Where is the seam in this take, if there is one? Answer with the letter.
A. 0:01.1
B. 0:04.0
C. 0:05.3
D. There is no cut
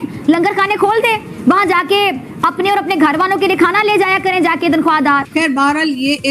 C